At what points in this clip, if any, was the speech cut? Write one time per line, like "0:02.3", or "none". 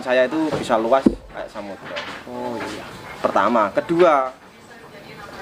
none